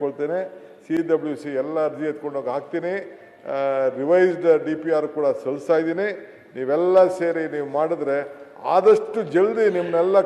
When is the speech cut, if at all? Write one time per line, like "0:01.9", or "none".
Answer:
none